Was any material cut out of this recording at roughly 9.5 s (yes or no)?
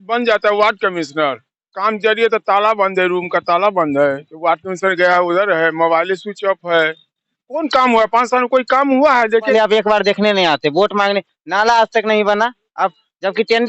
yes